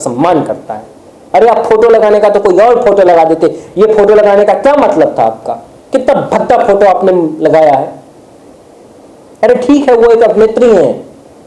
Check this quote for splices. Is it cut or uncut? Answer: uncut